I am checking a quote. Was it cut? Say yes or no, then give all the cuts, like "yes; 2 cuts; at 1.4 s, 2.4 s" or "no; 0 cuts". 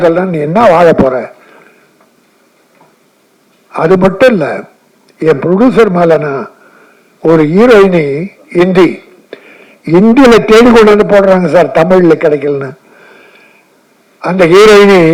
no; 0 cuts